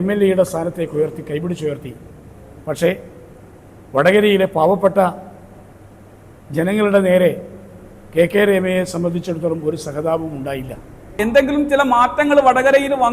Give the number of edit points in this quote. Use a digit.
1